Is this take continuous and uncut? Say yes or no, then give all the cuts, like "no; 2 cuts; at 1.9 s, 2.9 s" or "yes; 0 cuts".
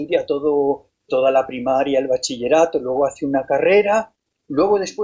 no; 1 cut; at 2.2 s